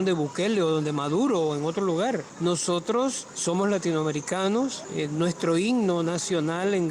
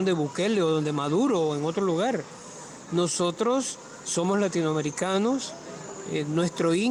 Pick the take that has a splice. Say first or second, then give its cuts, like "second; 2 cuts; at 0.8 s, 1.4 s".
first; 3 cuts; at 2.3 s, 3.3 s, 4.8 s